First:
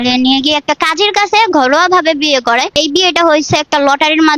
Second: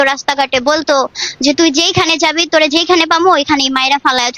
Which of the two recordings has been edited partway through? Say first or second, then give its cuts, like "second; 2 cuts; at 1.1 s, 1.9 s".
first; 1 cut; at 2.7 s